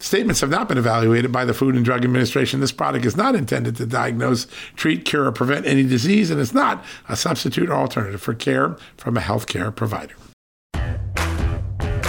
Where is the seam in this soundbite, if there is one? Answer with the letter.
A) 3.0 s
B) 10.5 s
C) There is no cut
B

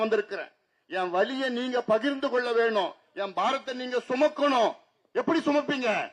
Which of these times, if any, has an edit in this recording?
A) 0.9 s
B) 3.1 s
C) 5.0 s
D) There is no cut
D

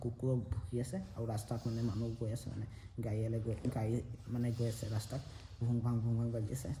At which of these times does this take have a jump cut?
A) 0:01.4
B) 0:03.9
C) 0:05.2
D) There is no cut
D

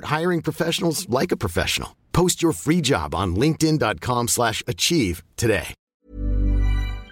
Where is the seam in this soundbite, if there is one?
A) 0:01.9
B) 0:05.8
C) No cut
B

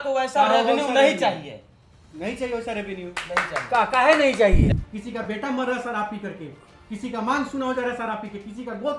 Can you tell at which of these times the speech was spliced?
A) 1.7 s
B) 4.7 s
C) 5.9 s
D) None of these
B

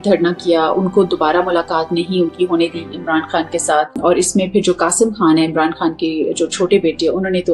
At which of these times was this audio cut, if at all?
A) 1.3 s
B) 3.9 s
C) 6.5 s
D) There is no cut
B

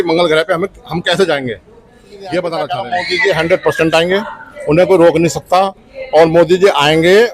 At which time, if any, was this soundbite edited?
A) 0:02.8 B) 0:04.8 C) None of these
A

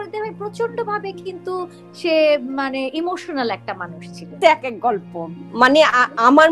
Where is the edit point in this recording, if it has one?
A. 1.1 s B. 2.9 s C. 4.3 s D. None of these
C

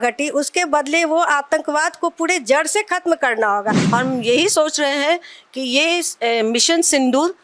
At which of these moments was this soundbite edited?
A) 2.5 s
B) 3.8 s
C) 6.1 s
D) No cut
B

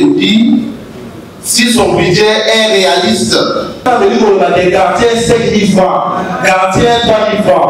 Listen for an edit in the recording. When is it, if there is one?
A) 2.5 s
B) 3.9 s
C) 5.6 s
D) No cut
B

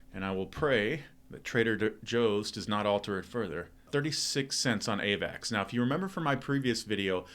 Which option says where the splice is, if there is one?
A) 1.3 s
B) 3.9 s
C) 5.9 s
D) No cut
B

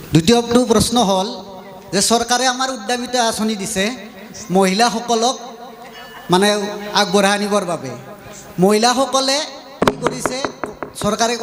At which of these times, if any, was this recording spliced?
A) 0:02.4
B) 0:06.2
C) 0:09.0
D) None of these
D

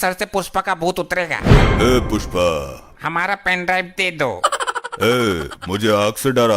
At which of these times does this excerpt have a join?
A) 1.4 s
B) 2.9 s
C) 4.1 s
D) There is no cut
B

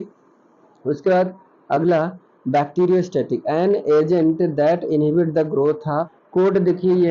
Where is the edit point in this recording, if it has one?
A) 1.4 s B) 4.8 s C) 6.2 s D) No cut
C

